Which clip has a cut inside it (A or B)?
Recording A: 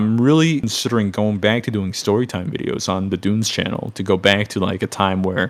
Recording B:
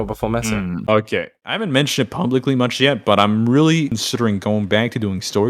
B